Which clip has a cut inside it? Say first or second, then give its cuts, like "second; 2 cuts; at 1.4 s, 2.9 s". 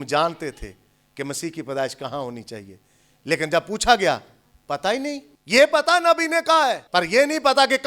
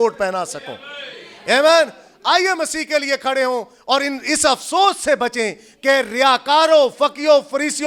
first; 2 cuts; at 5.3 s, 6.8 s